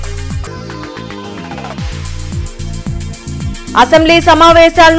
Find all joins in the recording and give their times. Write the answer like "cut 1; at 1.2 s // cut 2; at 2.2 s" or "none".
cut 1; at 3.6 s